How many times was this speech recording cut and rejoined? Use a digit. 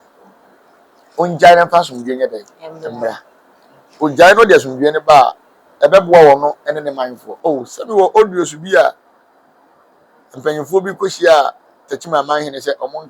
1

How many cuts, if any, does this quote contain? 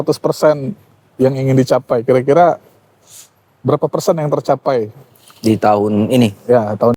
0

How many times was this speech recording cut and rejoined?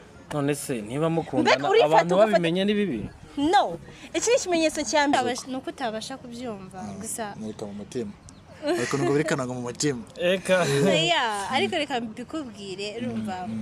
1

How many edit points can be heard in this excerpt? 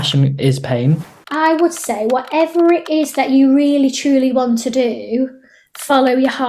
1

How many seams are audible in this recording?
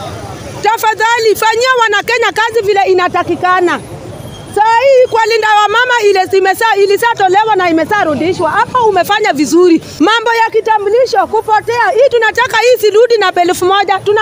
1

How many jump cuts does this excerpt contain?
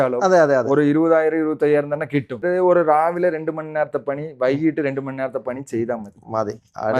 1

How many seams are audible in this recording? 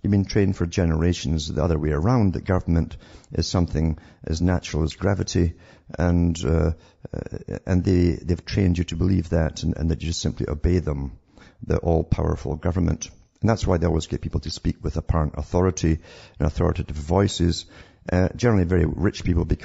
1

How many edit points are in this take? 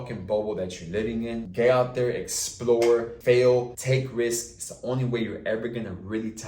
3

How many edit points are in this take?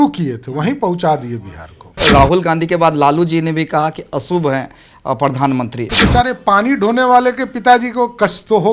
2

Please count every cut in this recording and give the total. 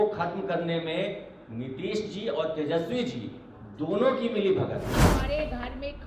1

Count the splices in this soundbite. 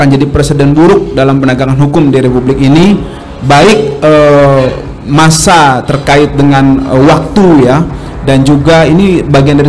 0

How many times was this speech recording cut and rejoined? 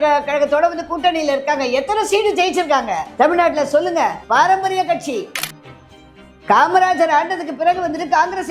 3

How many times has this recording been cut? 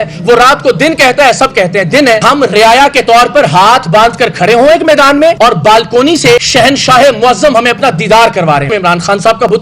2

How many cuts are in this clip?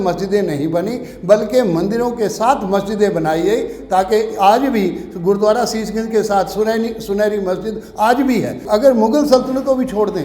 1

